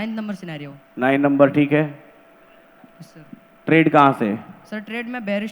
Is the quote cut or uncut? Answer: uncut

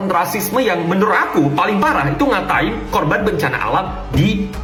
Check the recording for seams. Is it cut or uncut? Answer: uncut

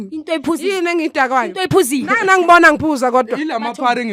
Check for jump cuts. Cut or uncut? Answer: uncut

